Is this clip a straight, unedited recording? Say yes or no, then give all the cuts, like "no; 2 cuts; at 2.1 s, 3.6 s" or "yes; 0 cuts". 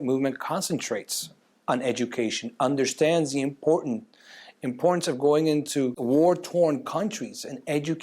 no; 1 cut; at 6.0 s